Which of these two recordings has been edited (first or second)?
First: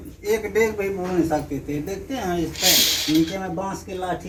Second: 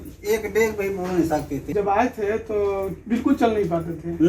second